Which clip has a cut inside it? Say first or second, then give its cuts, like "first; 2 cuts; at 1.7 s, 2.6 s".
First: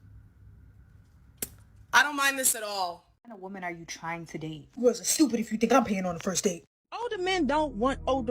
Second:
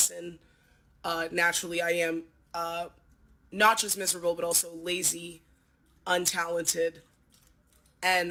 first; 2 cuts; at 3.5 s, 6.7 s